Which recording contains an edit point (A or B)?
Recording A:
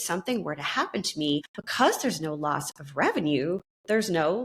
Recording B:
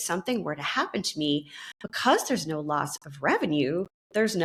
A